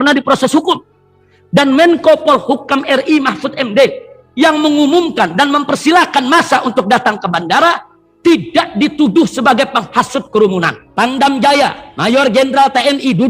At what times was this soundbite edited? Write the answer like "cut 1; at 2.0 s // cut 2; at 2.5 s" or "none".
cut 1; at 10.8 s

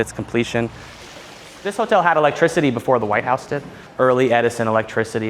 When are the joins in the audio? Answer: cut 1; at 1.4 s // cut 2; at 3.8 s

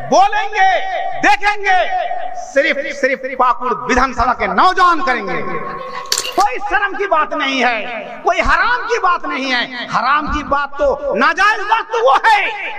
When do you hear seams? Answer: cut 1; at 6.2 s

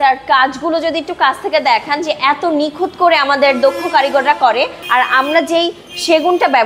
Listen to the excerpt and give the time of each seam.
cut 1; at 4.8 s

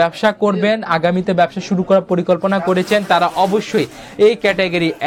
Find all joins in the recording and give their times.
none

